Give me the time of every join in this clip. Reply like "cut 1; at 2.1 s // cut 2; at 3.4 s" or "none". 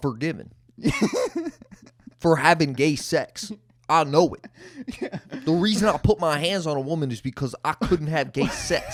none